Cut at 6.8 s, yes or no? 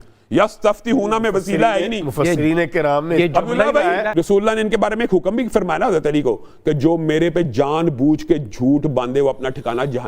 no